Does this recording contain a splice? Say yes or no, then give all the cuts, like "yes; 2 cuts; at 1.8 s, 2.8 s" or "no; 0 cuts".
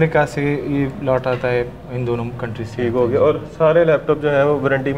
no; 0 cuts